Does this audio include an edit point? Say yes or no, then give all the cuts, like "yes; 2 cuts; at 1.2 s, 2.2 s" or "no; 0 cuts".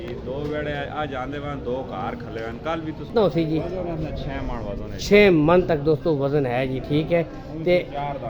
yes; 1 cut; at 3.1 s